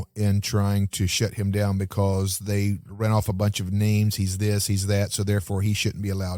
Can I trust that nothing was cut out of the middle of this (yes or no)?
yes